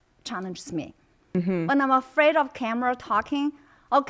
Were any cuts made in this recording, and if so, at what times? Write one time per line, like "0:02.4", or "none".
0:01.3